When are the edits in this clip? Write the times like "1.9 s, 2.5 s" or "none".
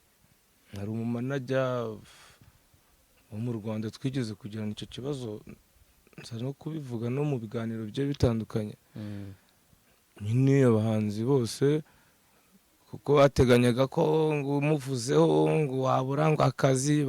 none